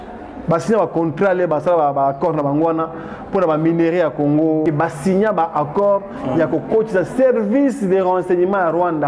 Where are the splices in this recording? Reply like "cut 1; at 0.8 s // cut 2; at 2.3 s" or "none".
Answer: cut 1; at 4.6 s